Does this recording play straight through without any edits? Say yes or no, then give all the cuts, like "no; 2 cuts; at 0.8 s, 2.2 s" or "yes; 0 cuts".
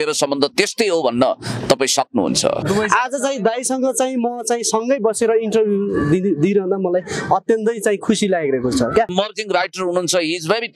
no; 2 cuts; at 2.6 s, 9.1 s